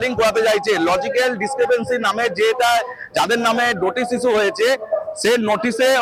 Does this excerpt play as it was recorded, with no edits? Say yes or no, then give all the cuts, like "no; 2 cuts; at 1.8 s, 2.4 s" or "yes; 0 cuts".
yes; 0 cuts